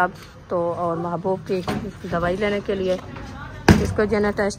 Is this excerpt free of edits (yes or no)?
yes